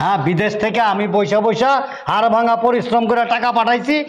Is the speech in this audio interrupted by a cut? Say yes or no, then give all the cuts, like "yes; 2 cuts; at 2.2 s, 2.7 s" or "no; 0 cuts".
no; 0 cuts